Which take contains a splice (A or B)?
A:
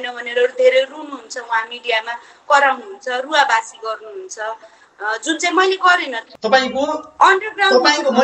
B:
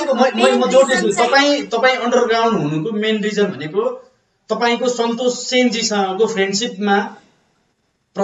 A